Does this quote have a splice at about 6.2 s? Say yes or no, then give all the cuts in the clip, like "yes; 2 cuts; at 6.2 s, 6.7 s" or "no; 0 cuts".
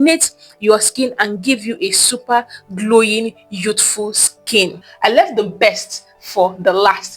no; 1 cut; at 4.9 s